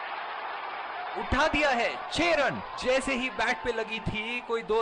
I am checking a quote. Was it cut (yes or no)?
no